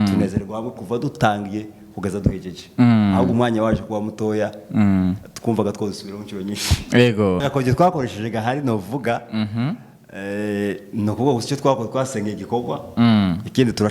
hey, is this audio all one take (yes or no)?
no